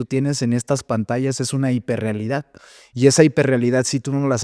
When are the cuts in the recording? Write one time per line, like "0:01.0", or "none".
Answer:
none